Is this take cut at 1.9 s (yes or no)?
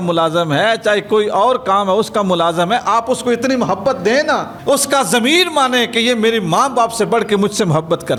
no